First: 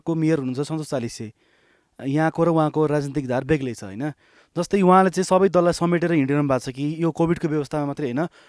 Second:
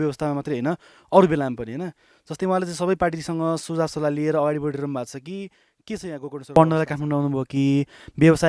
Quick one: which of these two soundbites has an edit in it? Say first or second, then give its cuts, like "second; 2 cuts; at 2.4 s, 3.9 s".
second; 1 cut; at 6.5 s